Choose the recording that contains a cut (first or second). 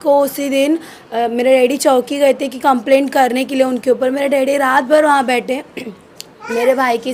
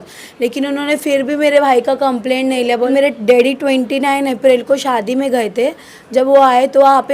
second